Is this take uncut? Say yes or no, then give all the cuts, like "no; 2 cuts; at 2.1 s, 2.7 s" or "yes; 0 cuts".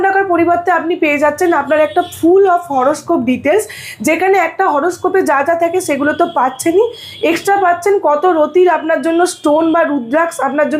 yes; 0 cuts